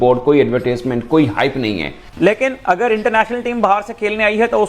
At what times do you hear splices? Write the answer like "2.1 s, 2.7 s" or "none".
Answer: 2.1 s